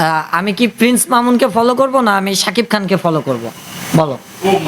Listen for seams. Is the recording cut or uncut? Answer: uncut